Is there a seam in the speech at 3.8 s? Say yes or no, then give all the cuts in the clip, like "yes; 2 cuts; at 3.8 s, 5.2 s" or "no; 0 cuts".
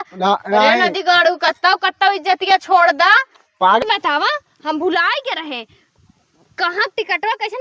yes; 1 cut; at 3.8 s